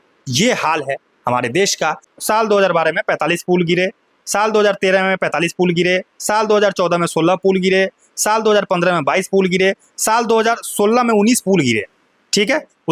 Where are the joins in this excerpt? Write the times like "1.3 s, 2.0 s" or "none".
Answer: 2.1 s